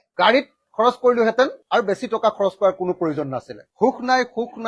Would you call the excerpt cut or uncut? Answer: cut